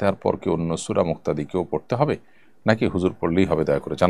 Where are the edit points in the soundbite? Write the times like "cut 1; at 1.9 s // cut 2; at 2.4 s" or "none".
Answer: none

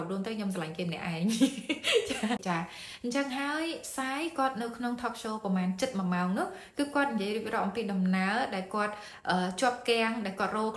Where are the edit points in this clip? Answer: cut 1; at 2.4 s

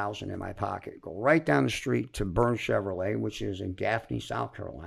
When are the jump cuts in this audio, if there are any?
none

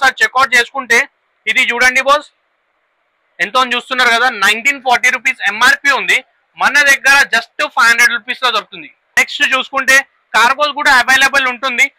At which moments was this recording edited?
cut 1; at 9.2 s

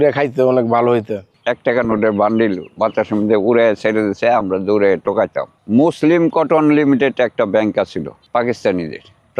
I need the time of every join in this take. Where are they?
cut 1; at 1.3 s // cut 2; at 5.5 s

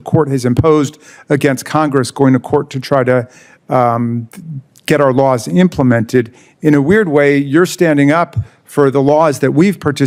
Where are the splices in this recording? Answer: none

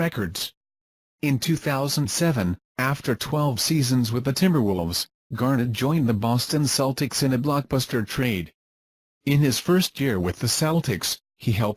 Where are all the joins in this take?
cut 1; at 7.6 s

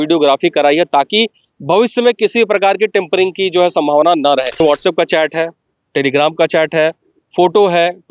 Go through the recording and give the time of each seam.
cut 1; at 4.6 s

